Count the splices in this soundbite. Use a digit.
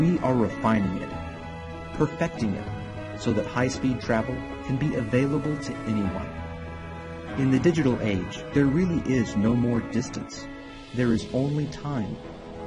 1